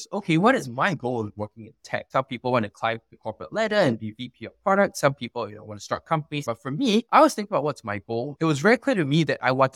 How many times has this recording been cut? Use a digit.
1